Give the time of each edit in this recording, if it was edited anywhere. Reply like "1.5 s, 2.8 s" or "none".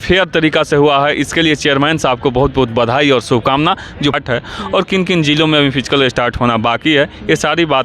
4.2 s